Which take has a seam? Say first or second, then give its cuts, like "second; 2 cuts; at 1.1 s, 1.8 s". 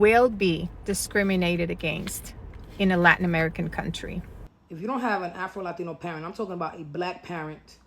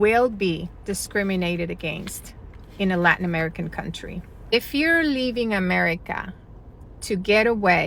first; 1 cut; at 4.5 s